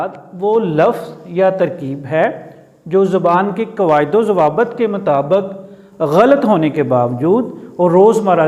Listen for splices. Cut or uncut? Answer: uncut